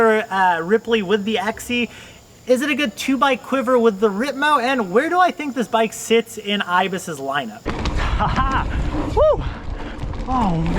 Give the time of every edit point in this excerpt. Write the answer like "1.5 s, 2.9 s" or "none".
7.6 s